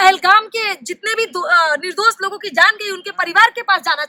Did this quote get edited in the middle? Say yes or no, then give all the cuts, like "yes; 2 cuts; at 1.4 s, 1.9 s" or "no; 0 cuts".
no; 0 cuts